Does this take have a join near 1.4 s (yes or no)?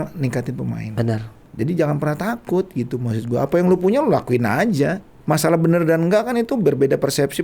yes